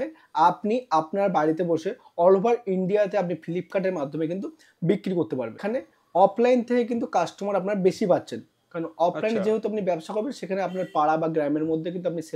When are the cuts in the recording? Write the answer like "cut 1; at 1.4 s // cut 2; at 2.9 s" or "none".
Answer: cut 1; at 5.6 s